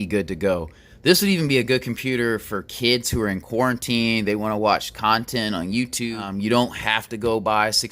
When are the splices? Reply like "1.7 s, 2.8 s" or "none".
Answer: 6.2 s

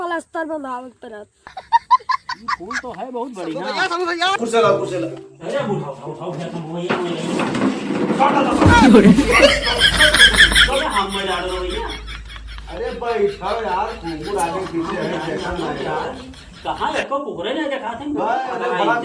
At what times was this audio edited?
4.3 s

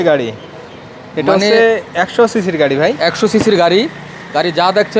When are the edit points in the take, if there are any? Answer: none

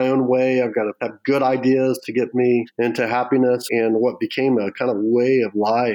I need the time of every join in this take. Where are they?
1.1 s, 2.7 s, 3.6 s

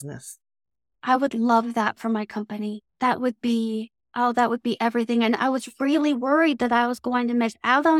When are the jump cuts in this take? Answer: 4.0 s

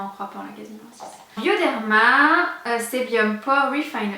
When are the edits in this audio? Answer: none

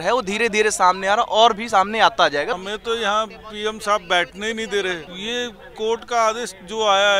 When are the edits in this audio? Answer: 2.6 s, 5.1 s

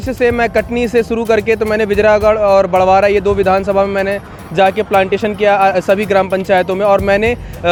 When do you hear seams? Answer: none

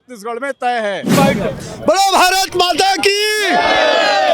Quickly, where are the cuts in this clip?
1.1 s

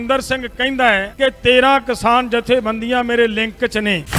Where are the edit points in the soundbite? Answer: 1.1 s

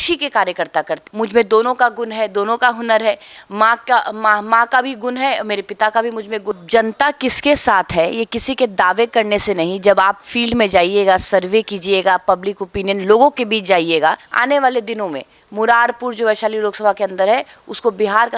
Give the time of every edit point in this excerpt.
1.0 s, 6.5 s, 14.3 s

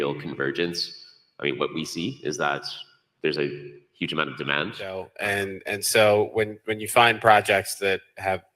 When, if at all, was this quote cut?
5.1 s

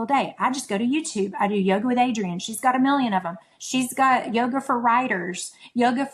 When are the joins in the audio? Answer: none

